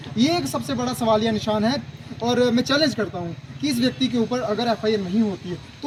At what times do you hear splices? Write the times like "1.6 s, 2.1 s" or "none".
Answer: none